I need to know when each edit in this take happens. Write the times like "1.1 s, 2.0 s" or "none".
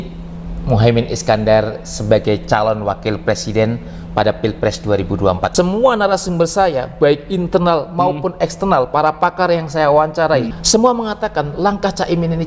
5.4 s, 10.6 s